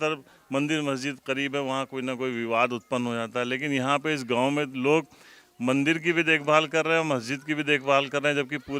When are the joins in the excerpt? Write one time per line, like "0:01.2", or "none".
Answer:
none

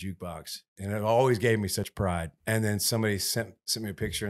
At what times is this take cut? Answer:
0:01.9

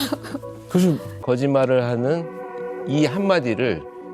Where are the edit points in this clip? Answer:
0:01.1

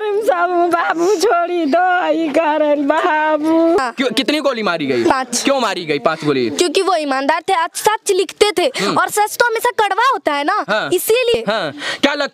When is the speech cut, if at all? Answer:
0:03.8
0:11.3

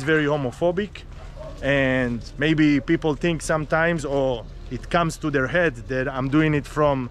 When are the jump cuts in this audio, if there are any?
none

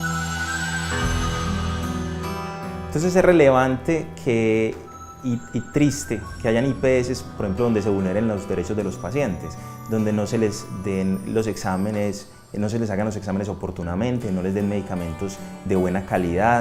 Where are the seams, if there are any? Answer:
0:14.3

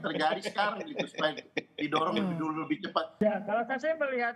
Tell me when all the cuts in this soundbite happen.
0:03.2

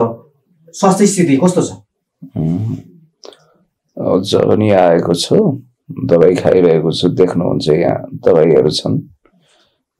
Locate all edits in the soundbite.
none

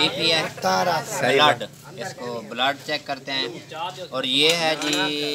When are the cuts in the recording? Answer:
none

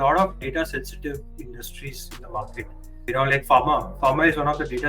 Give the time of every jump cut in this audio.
0:03.1

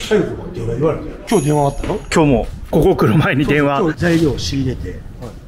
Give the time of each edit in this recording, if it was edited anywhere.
0:01.2
0:04.0

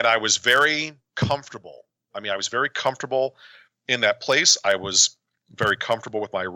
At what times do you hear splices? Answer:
0:01.0
0:02.0

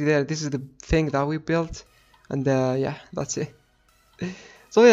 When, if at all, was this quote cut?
none

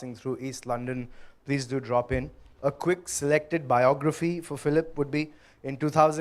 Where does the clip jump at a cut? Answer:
0:04.5

